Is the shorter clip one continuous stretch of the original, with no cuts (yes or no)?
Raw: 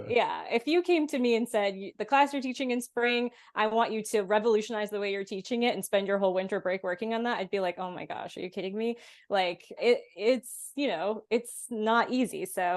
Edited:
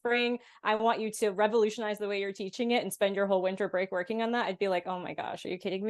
yes